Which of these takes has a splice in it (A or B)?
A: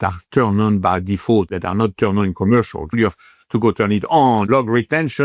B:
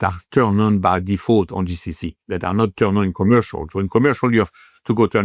A